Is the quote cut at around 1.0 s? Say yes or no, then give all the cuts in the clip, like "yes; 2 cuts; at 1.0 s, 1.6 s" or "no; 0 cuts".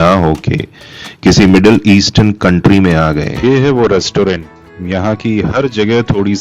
no; 1 cut; at 3.4 s